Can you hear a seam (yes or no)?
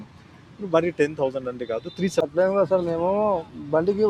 yes